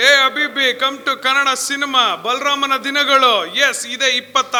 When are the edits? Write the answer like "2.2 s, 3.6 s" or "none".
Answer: none